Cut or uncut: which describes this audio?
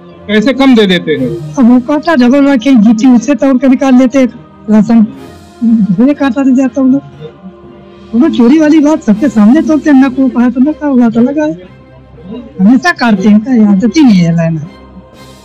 uncut